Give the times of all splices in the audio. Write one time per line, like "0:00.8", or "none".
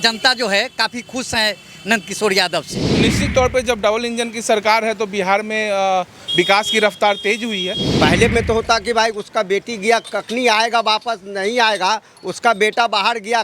0:02.8
0:07.8